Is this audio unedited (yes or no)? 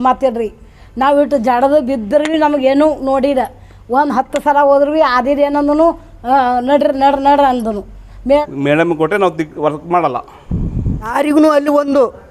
no